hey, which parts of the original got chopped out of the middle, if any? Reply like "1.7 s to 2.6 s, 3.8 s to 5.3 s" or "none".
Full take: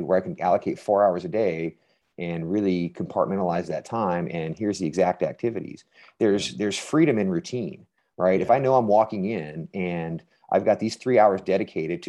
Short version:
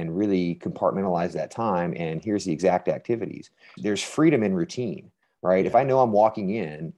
6.1 s to 6.5 s